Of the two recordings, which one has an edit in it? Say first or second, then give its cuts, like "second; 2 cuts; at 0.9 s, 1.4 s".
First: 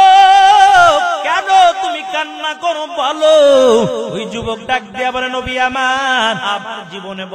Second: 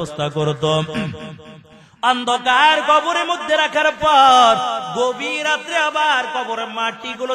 first; 3 cuts; at 1.3 s, 4.2 s, 6.4 s